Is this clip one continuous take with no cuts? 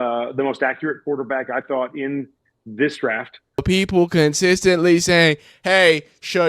no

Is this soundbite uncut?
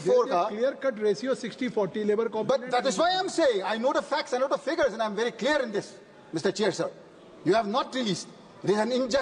yes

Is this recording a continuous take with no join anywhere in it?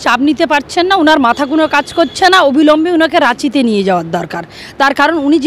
yes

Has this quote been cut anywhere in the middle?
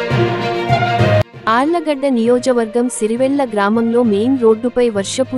yes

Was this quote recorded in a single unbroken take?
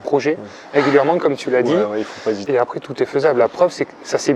no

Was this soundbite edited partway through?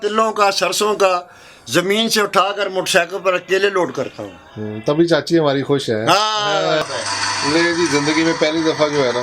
yes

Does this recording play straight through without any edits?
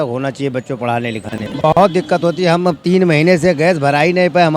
no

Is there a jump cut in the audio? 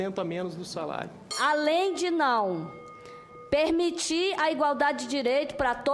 yes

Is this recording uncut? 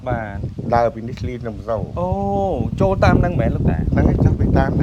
yes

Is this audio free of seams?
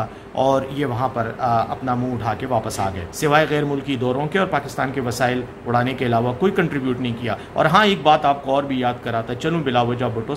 no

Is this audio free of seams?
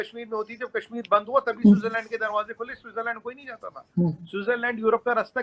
yes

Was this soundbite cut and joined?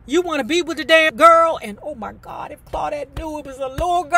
no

